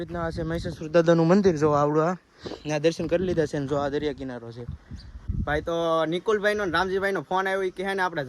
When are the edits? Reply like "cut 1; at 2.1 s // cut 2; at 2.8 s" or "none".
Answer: cut 1; at 5.3 s